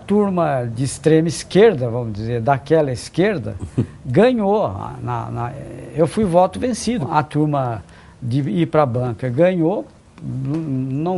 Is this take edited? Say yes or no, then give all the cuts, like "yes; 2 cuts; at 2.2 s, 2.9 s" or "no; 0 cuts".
no; 0 cuts